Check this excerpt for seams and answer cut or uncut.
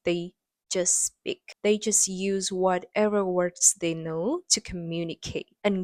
cut